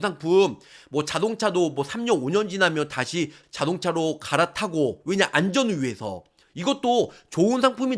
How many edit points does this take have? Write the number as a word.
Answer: one